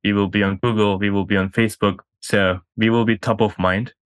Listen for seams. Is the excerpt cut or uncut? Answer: uncut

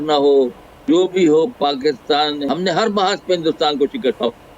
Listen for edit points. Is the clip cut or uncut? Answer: cut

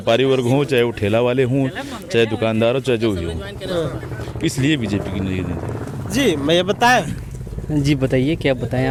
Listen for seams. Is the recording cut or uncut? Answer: uncut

